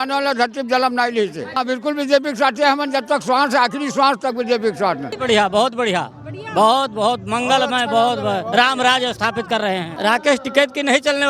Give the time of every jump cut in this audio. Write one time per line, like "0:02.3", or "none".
0:01.6
0:05.1
0:09.9